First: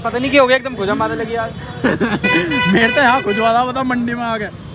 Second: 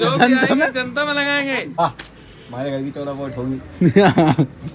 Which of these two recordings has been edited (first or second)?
second